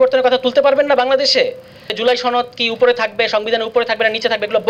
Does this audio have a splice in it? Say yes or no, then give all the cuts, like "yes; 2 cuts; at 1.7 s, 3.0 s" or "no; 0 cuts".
yes; 1 cut; at 1.9 s